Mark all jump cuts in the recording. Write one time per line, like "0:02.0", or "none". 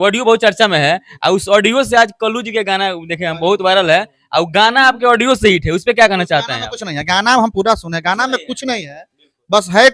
none